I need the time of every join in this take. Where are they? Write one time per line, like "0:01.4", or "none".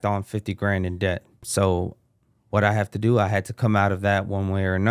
0:01.4